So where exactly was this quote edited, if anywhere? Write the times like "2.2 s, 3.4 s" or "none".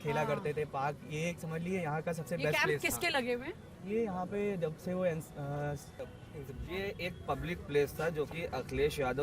6.0 s